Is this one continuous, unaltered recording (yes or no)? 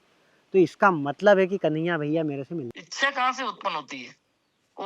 no